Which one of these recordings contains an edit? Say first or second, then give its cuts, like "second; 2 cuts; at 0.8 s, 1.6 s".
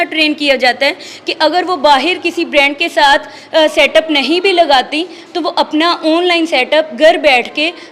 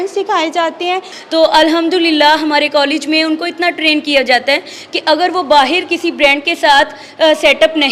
second; 1 cut; at 1.1 s